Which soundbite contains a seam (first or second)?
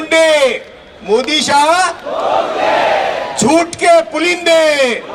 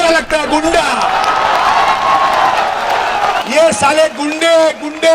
second